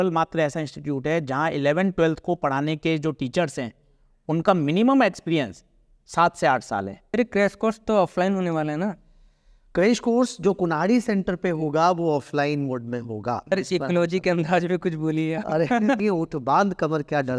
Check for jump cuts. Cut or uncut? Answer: cut